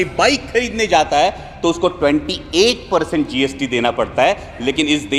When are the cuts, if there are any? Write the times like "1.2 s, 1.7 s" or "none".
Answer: none

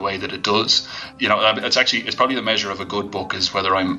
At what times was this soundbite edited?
0.9 s

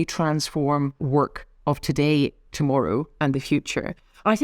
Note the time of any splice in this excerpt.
1.0 s

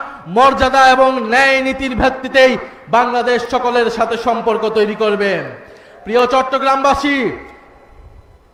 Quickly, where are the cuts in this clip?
none

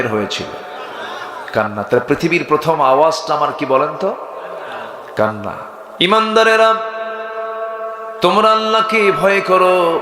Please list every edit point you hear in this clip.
5.8 s

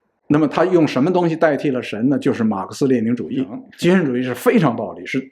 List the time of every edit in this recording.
3.6 s

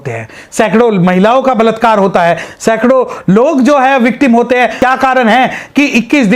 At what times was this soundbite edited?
4.8 s

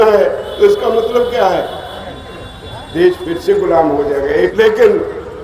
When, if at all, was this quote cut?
4.5 s

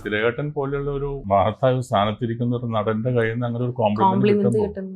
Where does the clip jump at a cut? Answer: 1.2 s

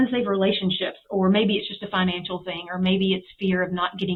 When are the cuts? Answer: none

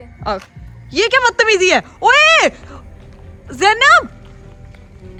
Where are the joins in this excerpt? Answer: none

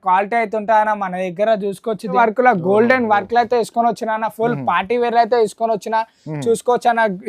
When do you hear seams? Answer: 2.2 s

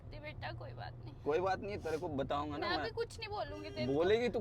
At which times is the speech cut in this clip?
none

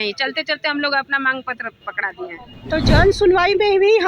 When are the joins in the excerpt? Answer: 2.5 s

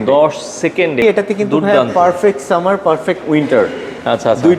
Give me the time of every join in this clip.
1.0 s

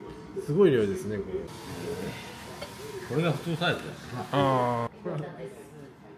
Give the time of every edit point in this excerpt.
1.5 s, 4.9 s

